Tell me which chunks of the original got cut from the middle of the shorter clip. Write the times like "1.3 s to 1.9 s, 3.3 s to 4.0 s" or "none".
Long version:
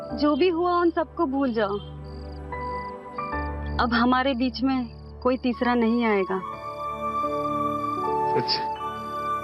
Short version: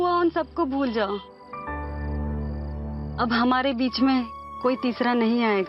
none